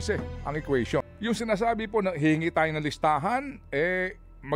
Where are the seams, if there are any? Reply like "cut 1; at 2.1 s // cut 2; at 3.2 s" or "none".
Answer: cut 1; at 1.1 s